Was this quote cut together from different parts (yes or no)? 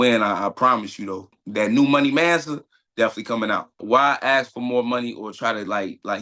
yes